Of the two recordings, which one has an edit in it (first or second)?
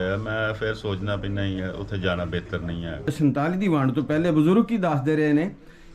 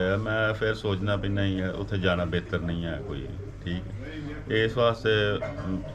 first